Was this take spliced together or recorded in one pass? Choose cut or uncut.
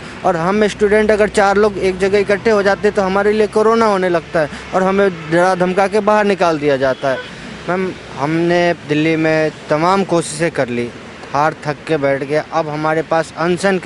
cut